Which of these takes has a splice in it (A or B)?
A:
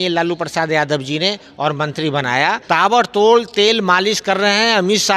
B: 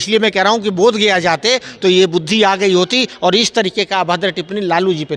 A